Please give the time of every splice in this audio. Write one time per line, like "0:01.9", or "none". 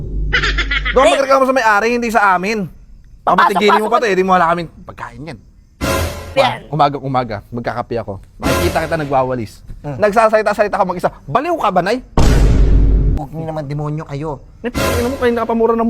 0:06.4
0:13.2